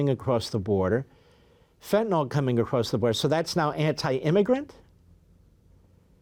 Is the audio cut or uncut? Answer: uncut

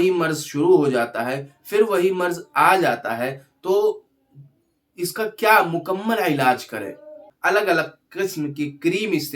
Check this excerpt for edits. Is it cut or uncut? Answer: cut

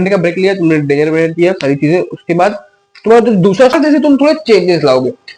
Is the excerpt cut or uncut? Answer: cut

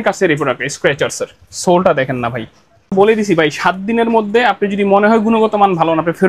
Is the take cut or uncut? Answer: cut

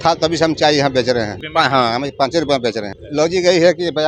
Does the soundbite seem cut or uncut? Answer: cut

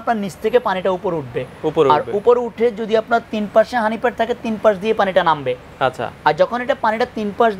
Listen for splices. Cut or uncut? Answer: uncut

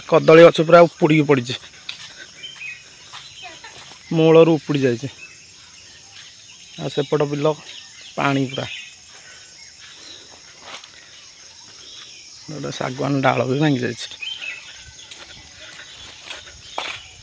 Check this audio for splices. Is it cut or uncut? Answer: uncut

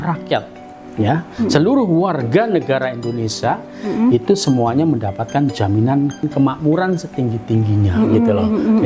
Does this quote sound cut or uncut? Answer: cut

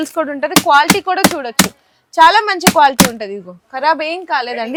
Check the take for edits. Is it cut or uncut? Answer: uncut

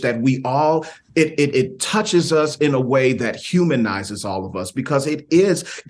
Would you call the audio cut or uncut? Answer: uncut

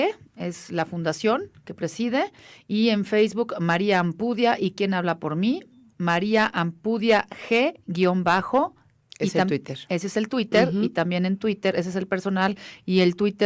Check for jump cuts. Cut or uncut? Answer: cut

